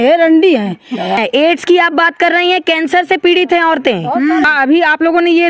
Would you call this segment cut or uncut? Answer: cut